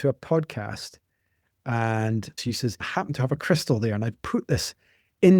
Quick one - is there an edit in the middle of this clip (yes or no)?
yes